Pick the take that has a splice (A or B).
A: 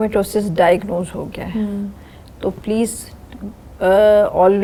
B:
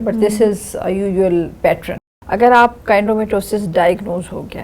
B